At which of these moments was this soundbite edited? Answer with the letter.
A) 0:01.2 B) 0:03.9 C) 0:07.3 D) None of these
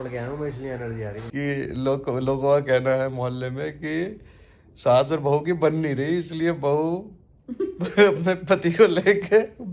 A